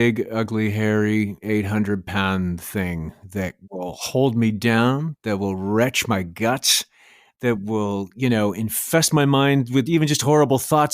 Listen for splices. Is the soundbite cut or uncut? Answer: cut